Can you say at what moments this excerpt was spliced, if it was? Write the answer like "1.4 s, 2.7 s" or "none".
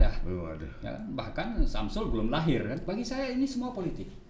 2.8 s